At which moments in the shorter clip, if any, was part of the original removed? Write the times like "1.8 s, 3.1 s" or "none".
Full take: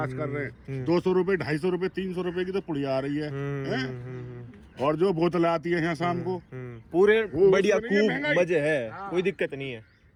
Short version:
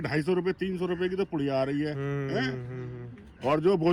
none